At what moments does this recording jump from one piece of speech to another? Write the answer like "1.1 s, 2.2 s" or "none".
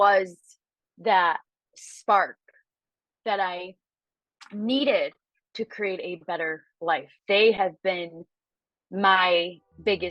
7.1 s